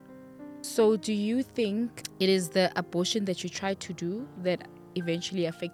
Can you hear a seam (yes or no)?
yes